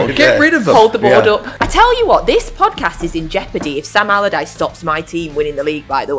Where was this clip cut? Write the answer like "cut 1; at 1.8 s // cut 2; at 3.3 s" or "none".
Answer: cut 1; at 1.6 s